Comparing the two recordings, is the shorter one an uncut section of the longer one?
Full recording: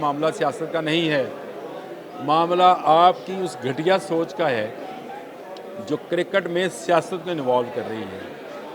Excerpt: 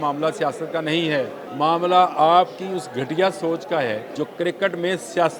no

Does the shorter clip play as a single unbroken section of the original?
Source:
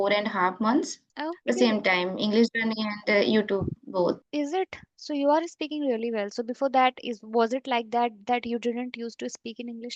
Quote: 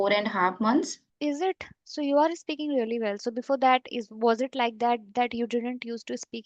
no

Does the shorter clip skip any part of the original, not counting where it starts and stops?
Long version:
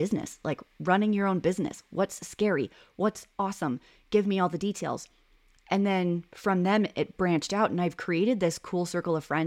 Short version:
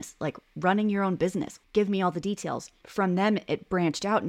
yes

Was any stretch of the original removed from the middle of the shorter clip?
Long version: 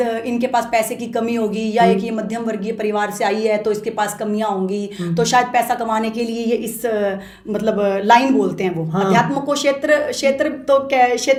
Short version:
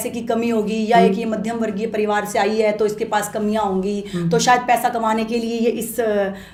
no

